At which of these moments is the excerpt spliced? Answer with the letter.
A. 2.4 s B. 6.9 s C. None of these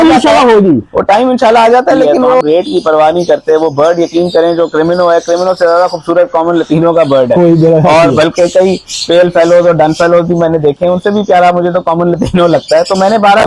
A